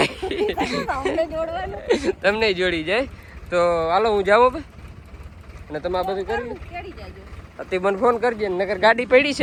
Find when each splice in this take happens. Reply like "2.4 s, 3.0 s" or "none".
none